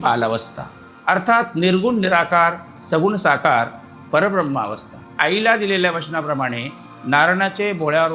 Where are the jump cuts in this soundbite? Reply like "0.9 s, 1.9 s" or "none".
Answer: 5.1 s